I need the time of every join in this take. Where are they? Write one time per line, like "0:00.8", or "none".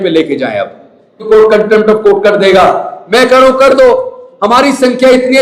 0:01.2